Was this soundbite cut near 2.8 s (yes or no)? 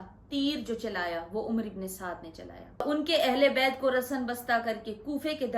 yes